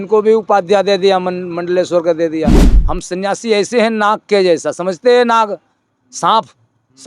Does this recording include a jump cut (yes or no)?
yes